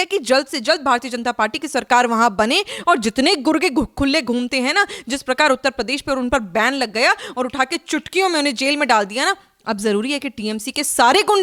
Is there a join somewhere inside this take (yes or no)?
no